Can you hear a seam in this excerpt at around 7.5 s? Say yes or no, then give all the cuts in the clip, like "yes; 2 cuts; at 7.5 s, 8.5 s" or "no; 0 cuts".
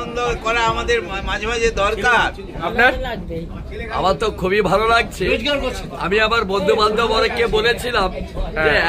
no; 1 cut; at 2.7 s